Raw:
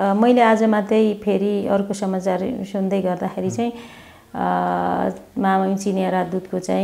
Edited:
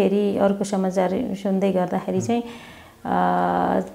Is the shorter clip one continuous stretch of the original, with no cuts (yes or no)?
yes